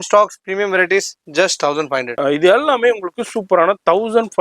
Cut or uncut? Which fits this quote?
cut